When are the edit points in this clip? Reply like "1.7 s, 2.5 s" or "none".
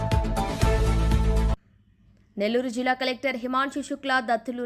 1.6 s